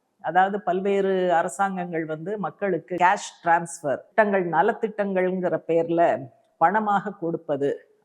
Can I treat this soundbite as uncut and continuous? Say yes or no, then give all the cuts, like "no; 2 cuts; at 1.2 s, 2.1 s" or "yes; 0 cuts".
no; 2 cuts; at 3.0 s, 4.1 s